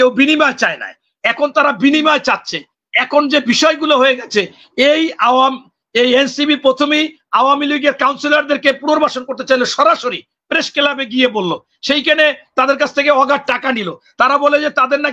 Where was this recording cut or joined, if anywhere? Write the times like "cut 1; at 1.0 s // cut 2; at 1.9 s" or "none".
none